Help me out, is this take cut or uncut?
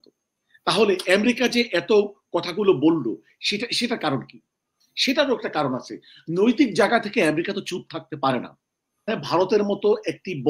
cut